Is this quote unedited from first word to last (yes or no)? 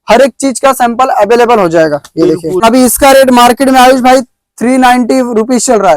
no